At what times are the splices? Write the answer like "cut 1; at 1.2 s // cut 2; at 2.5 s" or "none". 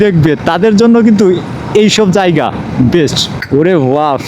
cut 1; at 3.3 s